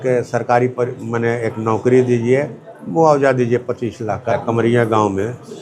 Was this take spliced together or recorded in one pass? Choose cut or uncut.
cut